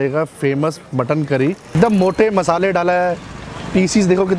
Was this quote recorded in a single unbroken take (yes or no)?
no